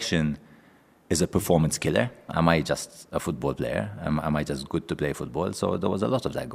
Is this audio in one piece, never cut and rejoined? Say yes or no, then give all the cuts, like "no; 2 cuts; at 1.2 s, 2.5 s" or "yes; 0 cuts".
no; 1 cut; at 2.3 s